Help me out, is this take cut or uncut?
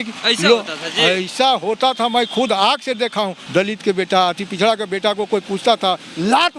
cut